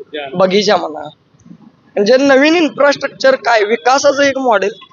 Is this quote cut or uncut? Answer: uncut